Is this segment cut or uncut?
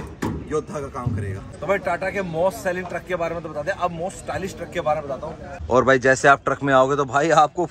cut